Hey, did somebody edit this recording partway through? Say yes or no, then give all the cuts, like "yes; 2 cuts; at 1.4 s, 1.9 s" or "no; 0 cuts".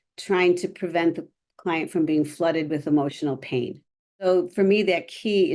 yes; 1 cut; at 4.2 s